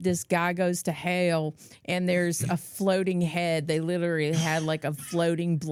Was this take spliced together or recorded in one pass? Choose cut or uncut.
uncut